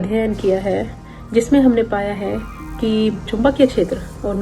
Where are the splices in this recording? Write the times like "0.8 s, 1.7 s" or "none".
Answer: 3.3 s